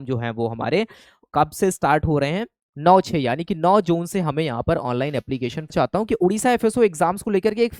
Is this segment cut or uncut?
cut